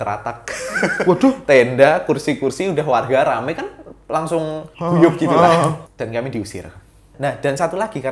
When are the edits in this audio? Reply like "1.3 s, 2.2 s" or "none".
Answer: 4.7 s, 5.9 s, 7.1 s